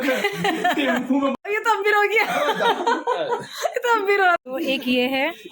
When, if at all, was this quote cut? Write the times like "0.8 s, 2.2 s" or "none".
1.3 s, 4.4 s